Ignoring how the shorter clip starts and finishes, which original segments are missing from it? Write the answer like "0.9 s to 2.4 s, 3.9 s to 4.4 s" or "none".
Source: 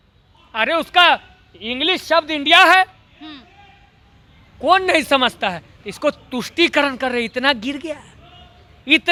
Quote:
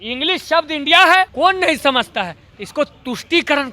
2.9 s to 4.6 s